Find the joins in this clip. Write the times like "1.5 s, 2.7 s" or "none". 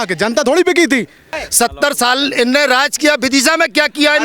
1.4 s